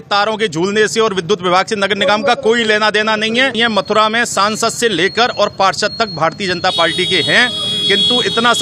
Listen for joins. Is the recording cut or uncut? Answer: cut